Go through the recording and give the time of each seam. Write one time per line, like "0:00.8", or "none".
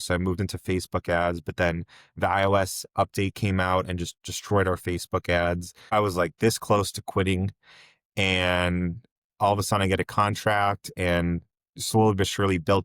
0:05.9

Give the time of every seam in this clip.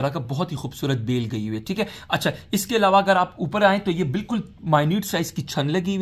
none

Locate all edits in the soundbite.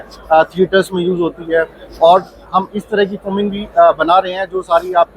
none

